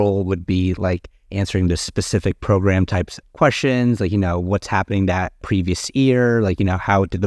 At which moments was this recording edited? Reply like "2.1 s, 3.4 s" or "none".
5.4 s

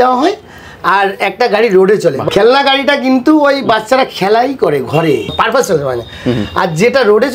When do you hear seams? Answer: 2.2 s, 5.3 s

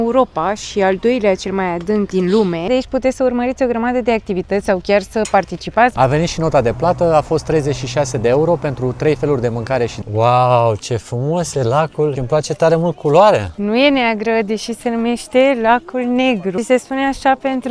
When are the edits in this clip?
2.3 s, 5.9 s, 10.0 s, 12.2 s, 13.5 s, 16.6 s

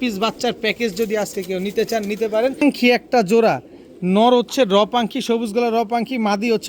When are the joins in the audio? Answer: 2.6 s

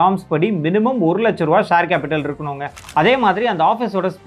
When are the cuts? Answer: 2.8 s

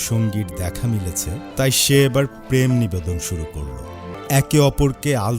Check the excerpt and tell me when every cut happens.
1.5 s, 4.1 s

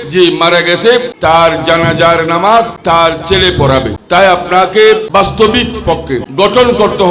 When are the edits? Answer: 1.1 s, 2.8 s, 4.0 s, 5.0 s, 6.3 s

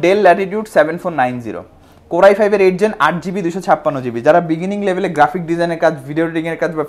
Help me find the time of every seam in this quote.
none

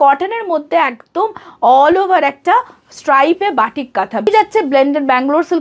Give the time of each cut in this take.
4.3 s

